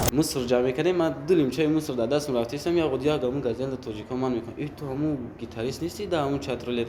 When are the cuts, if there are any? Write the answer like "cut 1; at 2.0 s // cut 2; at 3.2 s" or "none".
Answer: none